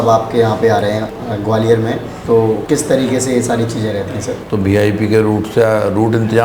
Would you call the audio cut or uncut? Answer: cut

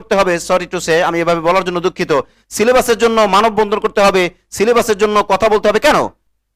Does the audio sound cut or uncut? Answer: uncut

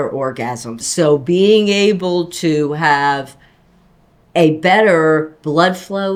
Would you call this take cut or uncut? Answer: uncut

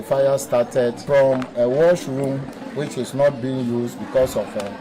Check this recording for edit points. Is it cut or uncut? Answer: cut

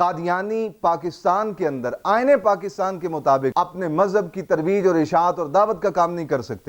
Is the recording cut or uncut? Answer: cut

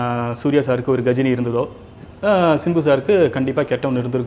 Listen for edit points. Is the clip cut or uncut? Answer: uncut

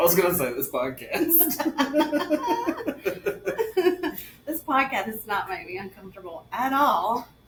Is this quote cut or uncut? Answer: uncut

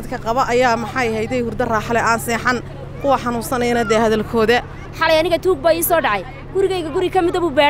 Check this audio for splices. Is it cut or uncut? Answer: cut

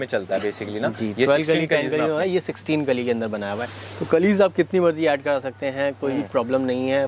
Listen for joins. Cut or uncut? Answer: uncut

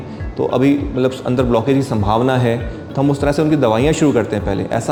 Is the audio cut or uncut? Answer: uncut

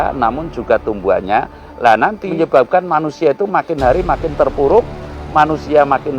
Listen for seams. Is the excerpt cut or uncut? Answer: cut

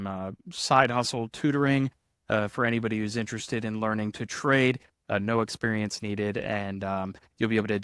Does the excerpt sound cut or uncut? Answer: uncut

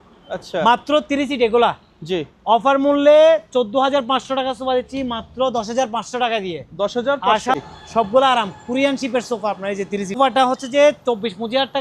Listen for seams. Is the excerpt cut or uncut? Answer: cut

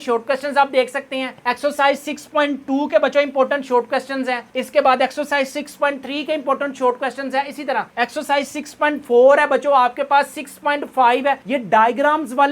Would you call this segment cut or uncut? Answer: uncut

